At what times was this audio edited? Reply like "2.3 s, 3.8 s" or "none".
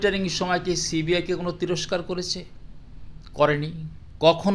none